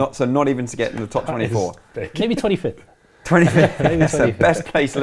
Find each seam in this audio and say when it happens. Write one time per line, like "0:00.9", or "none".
none